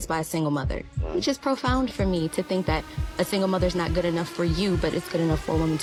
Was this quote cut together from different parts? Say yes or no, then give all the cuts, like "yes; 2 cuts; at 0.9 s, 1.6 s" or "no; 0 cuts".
no; 0 cuts